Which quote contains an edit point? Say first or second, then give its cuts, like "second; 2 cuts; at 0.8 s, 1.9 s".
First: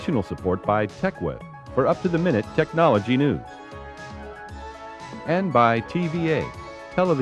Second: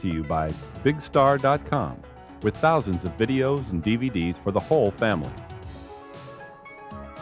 second; 1 cut; at 5.3 s